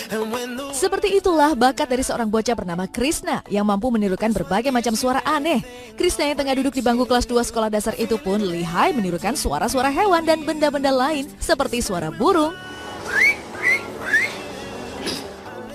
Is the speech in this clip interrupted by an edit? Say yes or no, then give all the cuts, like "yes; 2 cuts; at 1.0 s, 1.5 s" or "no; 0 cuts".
no; 0 cuts